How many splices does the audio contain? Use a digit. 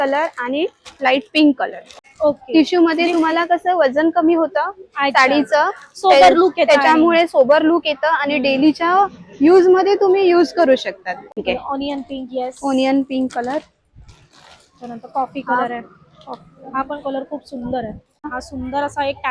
3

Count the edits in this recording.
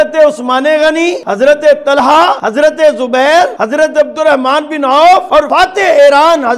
4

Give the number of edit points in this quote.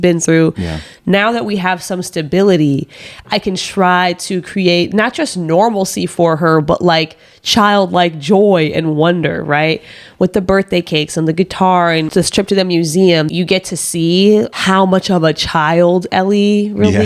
2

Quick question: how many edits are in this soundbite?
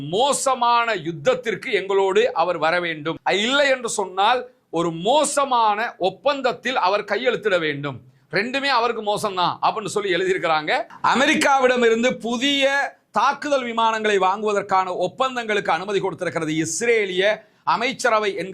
1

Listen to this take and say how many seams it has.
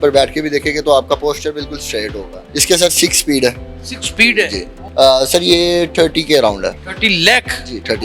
3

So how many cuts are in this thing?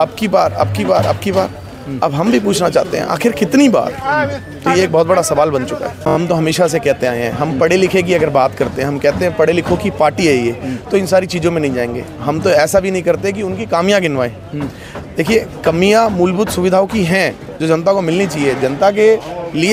1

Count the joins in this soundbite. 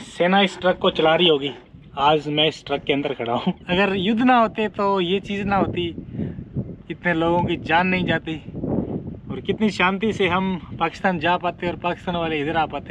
1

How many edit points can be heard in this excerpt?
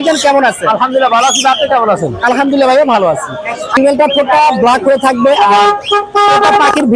1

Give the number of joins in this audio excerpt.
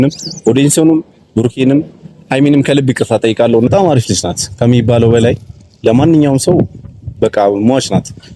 1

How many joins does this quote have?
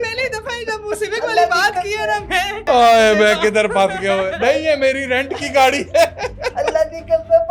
1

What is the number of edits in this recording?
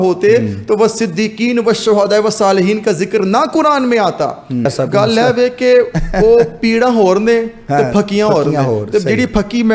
1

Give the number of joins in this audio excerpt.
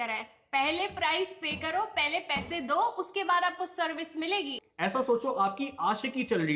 1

